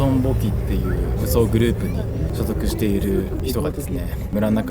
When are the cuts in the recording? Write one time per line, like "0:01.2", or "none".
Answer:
0:01.1
0:02.3
0:03.4